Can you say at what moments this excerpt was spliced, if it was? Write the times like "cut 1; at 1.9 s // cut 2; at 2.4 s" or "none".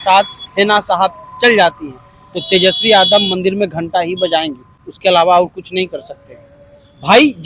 none